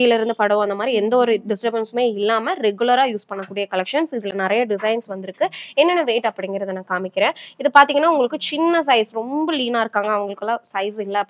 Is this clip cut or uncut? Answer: uncut